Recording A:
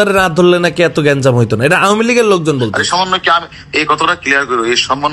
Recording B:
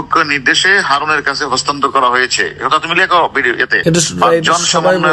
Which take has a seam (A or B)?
B